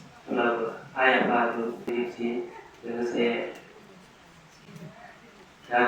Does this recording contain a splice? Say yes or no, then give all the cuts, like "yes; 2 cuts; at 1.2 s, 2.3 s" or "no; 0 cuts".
yes; 1 cut; at 1.9 s